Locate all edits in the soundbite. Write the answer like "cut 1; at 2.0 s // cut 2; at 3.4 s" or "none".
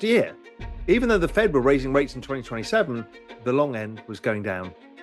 cut 1; at 3.3 s